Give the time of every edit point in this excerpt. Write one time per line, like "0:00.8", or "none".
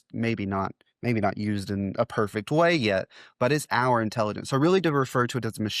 none